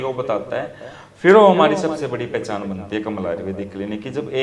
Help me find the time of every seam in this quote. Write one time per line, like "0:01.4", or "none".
none